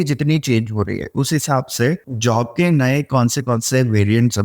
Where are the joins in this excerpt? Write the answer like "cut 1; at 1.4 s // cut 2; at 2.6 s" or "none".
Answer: cut 1; at 2.1 s